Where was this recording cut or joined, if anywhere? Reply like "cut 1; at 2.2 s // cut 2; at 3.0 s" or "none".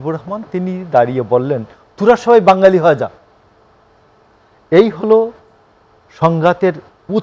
none